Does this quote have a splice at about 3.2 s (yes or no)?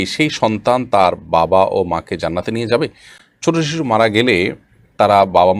no